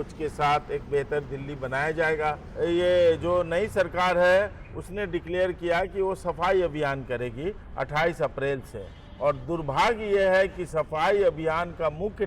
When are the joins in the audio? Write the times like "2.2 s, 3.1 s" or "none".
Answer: 2.5 s